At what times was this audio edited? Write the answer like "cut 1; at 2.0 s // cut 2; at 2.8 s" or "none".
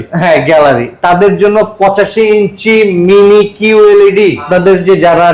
cut 1; at 4.4 s